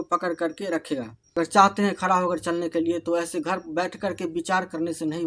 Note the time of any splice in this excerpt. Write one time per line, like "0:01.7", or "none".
0:01.4